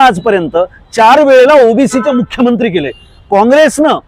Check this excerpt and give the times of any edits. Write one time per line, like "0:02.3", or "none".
none